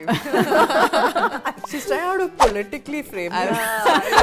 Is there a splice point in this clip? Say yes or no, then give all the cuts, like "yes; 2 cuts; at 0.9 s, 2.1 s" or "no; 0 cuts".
yes; 1 cut; at 1.7 s